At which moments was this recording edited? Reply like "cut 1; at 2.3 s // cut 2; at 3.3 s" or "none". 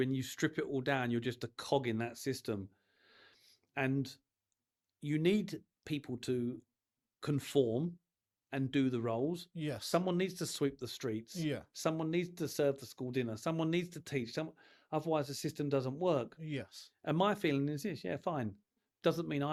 none